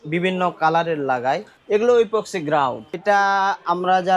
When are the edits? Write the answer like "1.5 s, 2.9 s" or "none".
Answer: 1.5 s, 3.0 s